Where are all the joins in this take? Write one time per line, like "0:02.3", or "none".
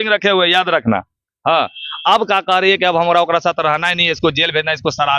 none